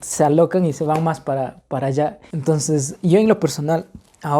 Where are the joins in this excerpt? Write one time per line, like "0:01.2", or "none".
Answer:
0:02.3